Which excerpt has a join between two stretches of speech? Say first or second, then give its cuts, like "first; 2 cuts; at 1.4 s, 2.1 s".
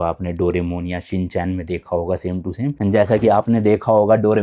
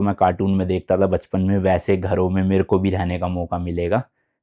first; 1 cut; at 2.8 s